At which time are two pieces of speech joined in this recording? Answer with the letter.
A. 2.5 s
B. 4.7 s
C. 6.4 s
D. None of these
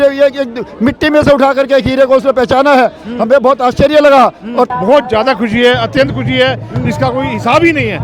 B